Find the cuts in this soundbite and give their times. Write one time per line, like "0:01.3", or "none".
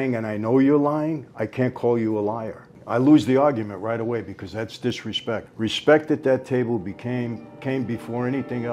0:02.8
0:05.5